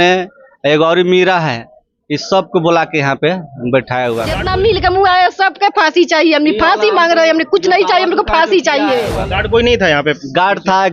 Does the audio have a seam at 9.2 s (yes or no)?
yes